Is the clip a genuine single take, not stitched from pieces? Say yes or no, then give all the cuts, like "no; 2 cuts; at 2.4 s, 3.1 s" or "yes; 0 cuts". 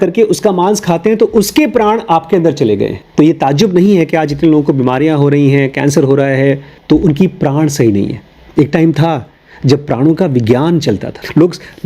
no; 1 cut; at 3.0 s